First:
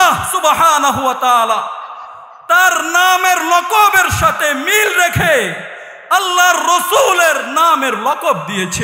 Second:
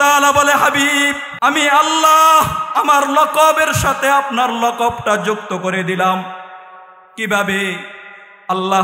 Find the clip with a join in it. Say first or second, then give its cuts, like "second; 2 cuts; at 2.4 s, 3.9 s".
second; 1 cut; at 1.2 s